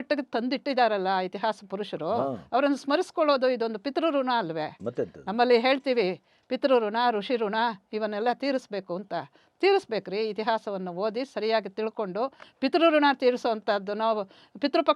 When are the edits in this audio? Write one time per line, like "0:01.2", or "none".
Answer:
none